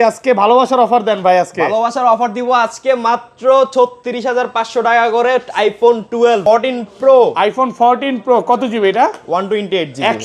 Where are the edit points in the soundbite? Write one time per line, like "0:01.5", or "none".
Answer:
0:06.4